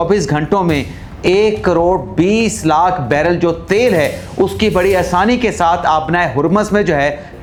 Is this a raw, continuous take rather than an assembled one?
yes; 0 cuts

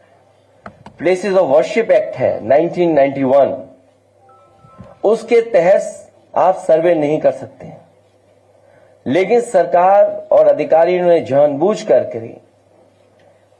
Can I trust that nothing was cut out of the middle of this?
yes; 0 cuts

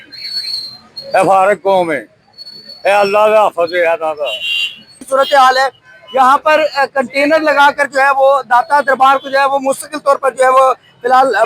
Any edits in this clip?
yes; 1 cut; at 5.0 s

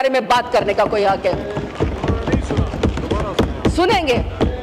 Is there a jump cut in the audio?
no; 0 cuts

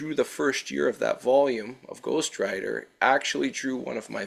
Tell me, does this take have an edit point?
no; 0 cuts

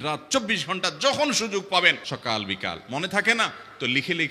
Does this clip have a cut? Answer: yes; 1 cut; at 2.1 s

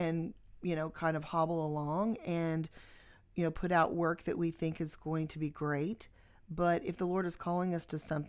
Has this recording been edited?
no; 0 cuts

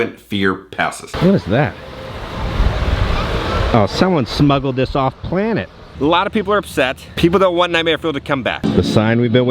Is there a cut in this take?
yes; 3 cuts; at 1.0 s, 5.9 s, 8.5 s

